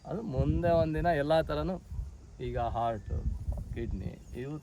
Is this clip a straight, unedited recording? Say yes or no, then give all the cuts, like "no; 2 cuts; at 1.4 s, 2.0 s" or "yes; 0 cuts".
yes; 0 cuts